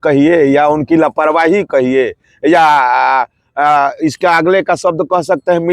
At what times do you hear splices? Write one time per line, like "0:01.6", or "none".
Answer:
none